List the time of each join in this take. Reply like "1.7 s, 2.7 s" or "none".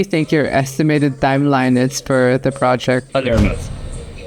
3.1 s